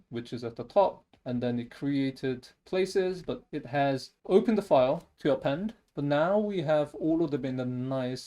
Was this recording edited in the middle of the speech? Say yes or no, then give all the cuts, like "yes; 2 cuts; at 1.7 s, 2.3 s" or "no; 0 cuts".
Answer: yes; 2 cuts; at 3.5 s, 5.8 s